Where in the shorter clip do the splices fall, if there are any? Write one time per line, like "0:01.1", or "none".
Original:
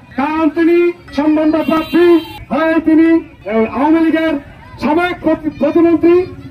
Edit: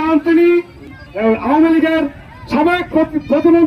0:00.9